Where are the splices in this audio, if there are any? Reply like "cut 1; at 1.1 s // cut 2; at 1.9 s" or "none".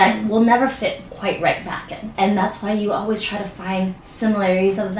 cut 1; at 1.1 s // cut 2; at 2.1 s // cut 3; at 4.0 s